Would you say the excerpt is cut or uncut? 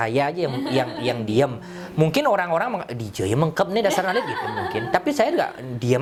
uncut